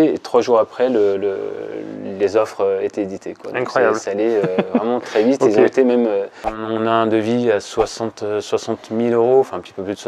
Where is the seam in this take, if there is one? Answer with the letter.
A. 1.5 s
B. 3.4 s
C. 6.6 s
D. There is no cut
C